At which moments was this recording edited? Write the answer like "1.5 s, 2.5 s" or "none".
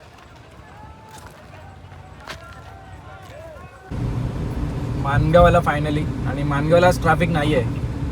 3.9 s